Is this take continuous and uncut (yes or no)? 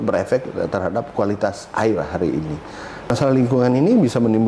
no